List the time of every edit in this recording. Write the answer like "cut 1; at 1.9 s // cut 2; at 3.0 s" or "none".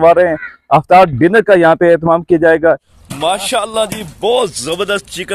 cut 1; at 2.9 s